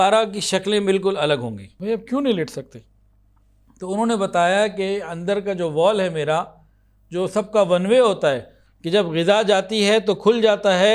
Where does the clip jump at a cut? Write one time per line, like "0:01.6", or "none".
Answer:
0:01.7